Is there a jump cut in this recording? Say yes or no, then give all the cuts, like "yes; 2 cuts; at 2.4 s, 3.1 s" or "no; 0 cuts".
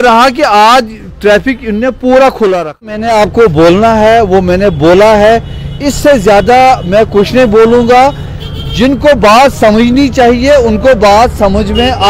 yes; 1 cut; at 3.0 s